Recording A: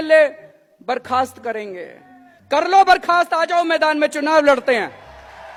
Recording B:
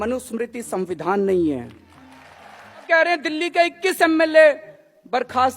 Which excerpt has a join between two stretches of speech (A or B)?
B